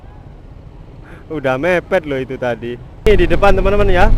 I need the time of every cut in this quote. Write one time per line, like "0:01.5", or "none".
0:02.9